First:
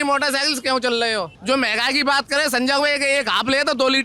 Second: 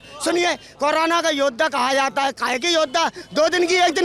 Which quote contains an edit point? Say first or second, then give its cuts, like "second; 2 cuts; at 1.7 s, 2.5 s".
first; 1 cut; at 1.4 s